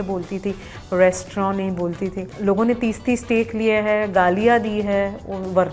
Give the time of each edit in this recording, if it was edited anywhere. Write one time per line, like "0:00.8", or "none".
none

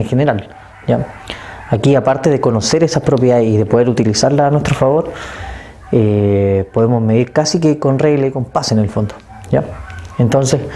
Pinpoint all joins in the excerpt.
none

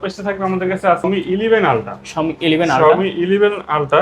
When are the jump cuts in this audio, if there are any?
0:01.0

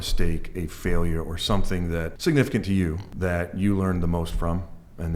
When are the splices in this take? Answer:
0:02.1
0:03.1

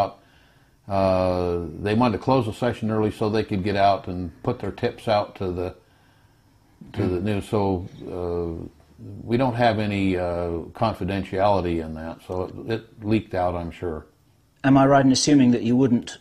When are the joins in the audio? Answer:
0:14.2

